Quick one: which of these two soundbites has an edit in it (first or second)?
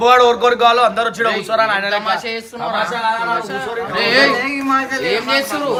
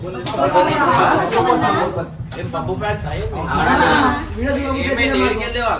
second